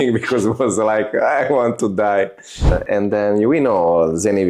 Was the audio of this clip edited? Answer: yes; 1 cut; at 2.8 s

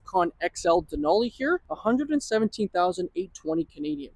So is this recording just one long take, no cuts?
no; 1 cut; at 1.7 s

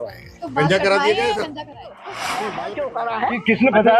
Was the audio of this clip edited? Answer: yes; 1 cut; at 2.4 s

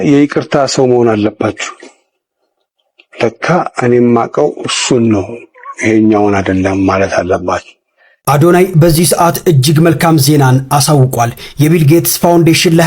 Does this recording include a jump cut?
yes; 1 cut; at 8.1 s

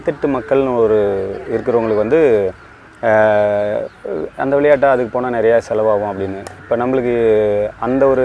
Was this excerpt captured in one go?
yes; 0 cuts

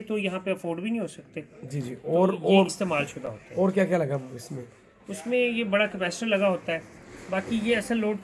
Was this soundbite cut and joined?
no; 0 cuts

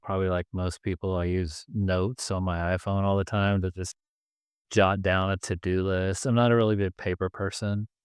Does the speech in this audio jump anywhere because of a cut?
no; 0 cuts

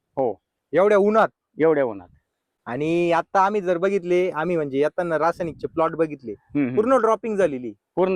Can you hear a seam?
no; 0 cuts

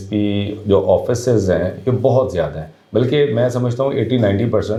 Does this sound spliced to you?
no; 0 cuts

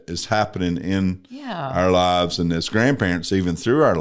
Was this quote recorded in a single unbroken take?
yes; 0 cuts

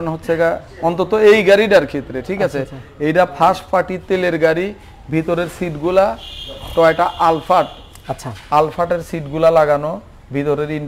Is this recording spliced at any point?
no; 0 cuts

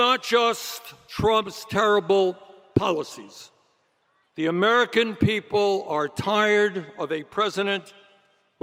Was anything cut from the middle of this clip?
no; 0 cuts

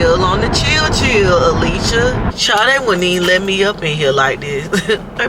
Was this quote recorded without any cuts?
no; 1 cut; at 2.3 s

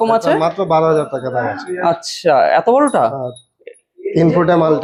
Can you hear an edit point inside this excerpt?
no; 0 cuts

